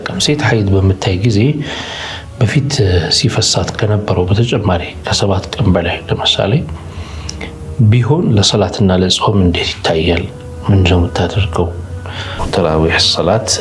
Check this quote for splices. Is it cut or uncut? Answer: cut